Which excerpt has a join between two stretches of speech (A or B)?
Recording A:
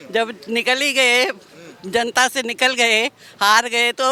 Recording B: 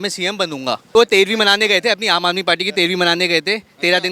B